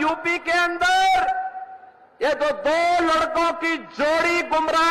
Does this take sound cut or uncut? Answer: uncut